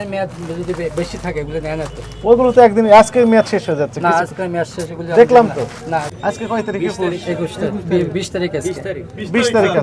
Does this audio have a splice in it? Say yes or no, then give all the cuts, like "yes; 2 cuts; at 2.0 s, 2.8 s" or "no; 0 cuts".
yes; 1 cut; at 6.1 s